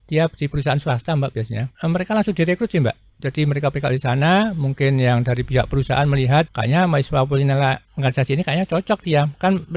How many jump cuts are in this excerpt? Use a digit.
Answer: 3